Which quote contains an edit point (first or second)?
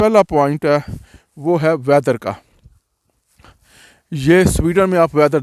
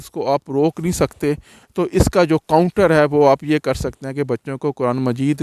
second